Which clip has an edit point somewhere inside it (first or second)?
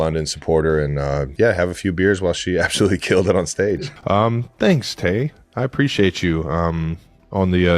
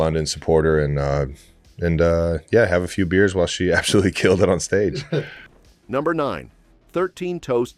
first